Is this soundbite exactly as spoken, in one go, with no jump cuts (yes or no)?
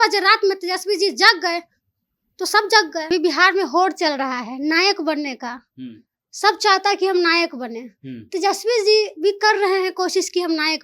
no